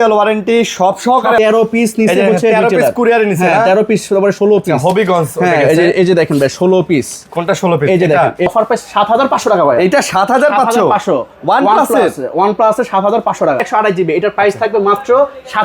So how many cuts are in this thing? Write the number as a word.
three